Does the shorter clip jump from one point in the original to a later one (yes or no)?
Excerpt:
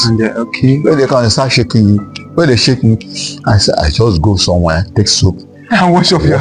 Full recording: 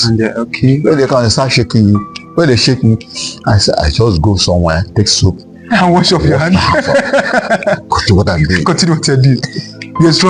no